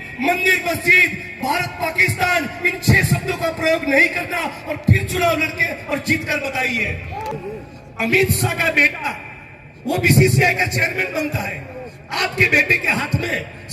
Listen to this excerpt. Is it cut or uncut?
cut